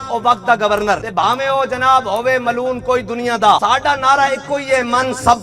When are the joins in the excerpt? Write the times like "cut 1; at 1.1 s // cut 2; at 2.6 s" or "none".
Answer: cut 1; at 1.1 s // cut 2; at 3.6 s